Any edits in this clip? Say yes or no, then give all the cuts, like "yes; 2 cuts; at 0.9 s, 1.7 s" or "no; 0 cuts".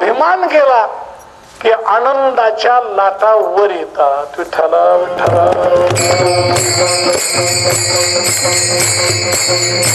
no; 0 cuts